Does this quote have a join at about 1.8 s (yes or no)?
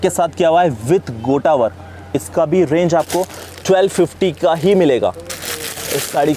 no